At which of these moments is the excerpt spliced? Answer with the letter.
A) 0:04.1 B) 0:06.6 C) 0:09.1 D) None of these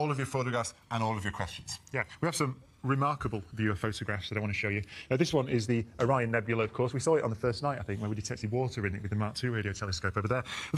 B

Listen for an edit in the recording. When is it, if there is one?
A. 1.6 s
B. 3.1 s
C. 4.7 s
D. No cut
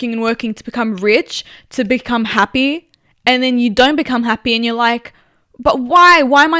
D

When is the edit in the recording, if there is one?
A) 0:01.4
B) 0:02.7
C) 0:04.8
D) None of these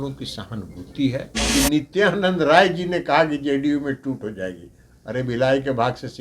A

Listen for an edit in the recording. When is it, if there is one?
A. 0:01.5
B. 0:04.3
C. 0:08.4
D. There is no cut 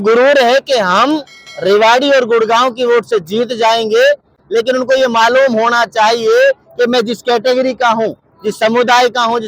D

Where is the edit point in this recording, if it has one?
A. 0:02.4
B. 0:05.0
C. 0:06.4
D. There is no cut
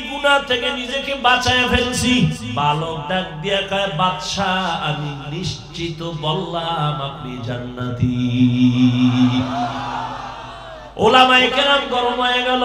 A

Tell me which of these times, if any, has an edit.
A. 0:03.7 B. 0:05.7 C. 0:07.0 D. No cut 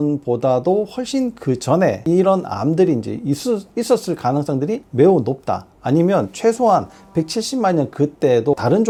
D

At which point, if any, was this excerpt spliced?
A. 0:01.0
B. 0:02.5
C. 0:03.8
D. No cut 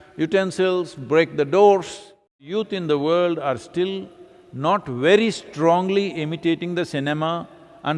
B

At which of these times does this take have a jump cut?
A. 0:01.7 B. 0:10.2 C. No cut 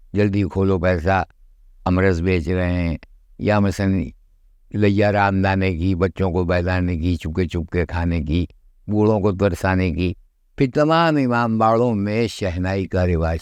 C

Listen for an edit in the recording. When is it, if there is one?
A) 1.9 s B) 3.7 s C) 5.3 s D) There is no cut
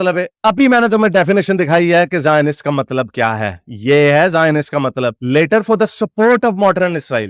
D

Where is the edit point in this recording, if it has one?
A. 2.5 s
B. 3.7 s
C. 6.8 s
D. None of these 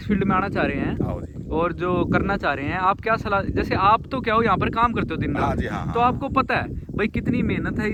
D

